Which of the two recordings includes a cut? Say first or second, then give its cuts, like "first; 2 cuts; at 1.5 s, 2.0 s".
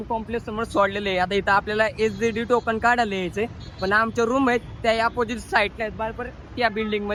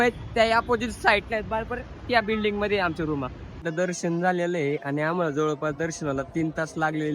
second; 1 cut; at 3.6 s